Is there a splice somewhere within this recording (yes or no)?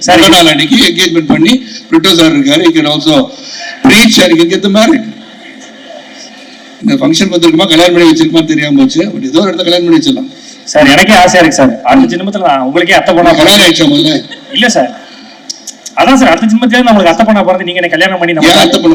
no